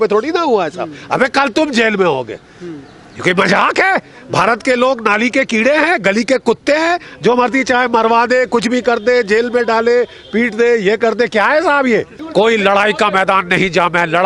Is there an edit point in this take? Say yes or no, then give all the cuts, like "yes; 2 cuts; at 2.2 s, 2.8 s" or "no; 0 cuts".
yes; 1 cut; at 12.2 s